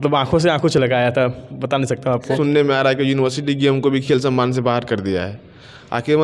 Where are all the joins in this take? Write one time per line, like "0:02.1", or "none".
0:02.4